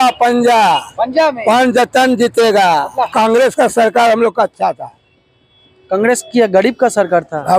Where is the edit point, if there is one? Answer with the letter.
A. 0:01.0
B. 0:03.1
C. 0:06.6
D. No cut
B